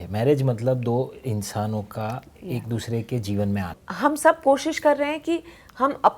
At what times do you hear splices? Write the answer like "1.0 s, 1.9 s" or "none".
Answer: 3.8 s